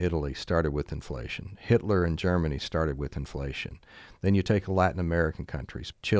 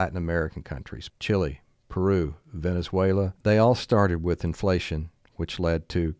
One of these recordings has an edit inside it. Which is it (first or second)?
second